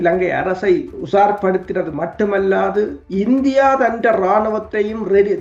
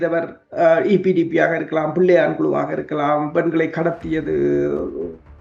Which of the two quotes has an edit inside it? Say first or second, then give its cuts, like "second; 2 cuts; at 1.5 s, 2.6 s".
first; 2 cuts; at 1.0 s, 3.0 s